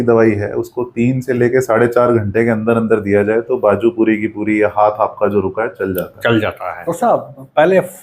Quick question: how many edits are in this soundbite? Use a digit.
1